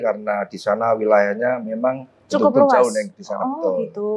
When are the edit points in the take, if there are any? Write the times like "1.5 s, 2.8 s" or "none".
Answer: none